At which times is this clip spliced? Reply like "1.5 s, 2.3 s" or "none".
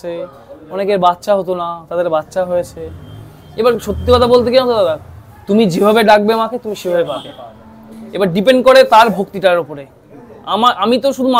none